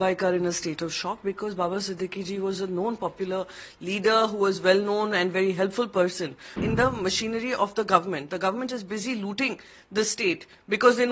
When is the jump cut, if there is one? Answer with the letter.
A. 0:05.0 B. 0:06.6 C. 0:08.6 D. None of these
B